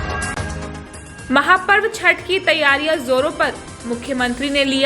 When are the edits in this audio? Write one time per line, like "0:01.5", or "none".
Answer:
0:00.9